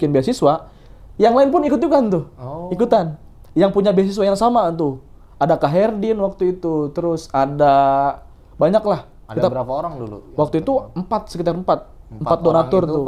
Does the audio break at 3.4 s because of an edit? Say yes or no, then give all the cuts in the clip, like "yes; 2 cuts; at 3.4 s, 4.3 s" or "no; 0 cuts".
no; 0 cuts